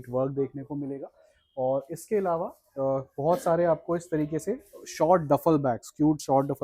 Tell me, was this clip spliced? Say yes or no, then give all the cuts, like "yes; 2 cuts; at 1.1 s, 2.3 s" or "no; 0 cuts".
no; 0 cuts